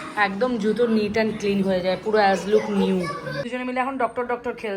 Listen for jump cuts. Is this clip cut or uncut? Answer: cut